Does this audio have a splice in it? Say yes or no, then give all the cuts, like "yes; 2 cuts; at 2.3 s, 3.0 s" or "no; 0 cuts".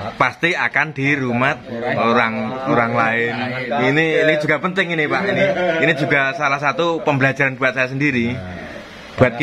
no; 0 cuts